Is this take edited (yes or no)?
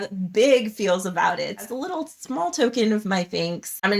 yes